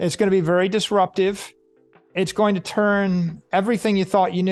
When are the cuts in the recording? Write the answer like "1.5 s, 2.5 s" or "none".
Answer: none